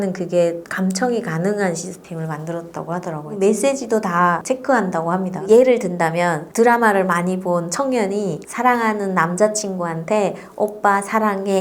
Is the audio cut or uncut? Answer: cut